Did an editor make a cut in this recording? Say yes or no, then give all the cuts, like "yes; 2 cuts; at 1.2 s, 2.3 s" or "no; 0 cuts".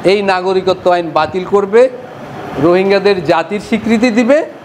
no; 0 cuts